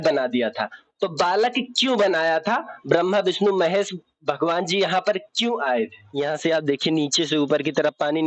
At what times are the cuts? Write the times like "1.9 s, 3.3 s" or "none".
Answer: 6.0 s